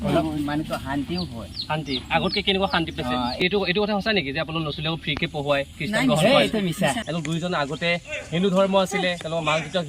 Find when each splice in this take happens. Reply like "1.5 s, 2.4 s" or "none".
3.4 s, 7.0 s